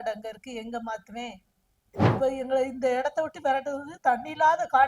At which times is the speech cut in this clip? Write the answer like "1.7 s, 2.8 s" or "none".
2.0 s

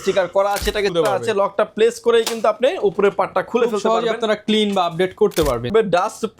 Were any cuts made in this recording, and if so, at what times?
0.9 s, 5.7 s

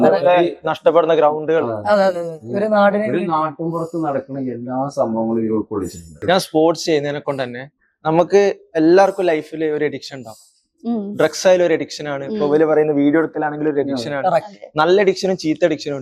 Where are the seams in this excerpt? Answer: 6.2 s

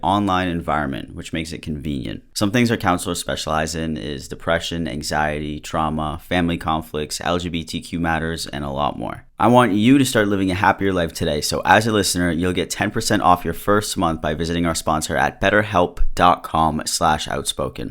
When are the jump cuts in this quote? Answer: 2.2 s, 9.2 s

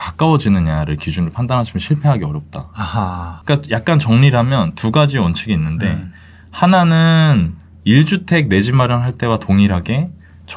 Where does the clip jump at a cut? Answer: 3.3 s

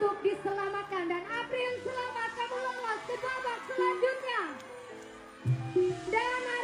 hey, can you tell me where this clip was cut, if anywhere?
none

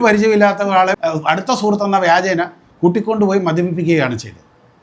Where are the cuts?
1.0 s

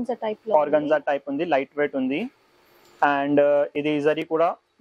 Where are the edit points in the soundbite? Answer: none

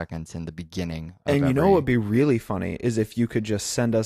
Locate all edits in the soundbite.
3.0 s

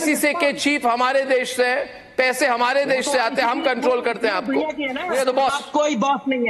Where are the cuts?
5.1 s

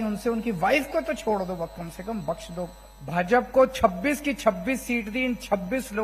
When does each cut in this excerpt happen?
2.9 s

